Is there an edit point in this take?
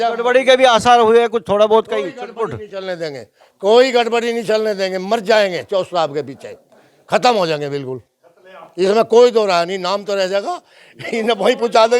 no; 0 cuts

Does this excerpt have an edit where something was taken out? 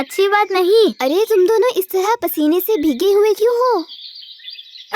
yes; 1 cut; at 1.0 s

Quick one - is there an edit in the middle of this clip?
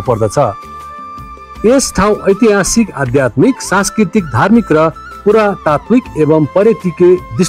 no; 0 cuts

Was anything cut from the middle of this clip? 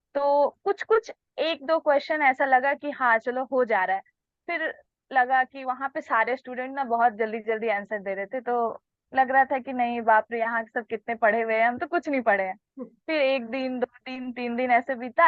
no; 0 cuts

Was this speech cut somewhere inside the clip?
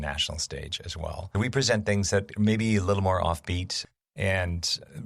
yes; 1 cut; at 1.2 s

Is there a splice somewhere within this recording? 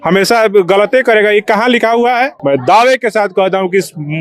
yes; 1 cut; at 2.3 s

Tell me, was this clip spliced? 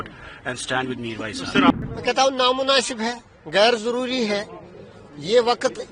yes; 1 cut; at 1.7 s

